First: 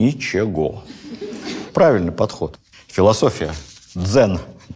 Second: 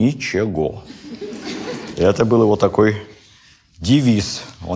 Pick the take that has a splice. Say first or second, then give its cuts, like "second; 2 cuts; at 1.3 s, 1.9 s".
first; 1 cut; at 1.7 s